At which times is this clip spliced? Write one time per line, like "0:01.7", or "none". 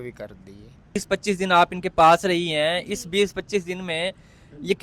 0:00.9